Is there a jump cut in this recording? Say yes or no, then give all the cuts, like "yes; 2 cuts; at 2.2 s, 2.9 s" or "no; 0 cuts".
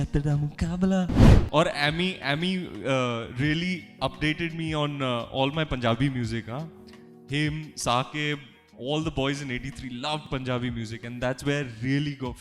yes; 1 cut; at 1.2 s